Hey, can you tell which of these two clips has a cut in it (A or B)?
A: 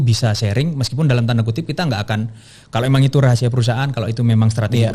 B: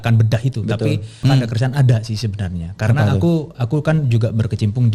B